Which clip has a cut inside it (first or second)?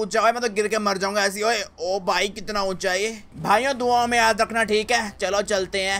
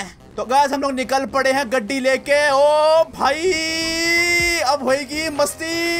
first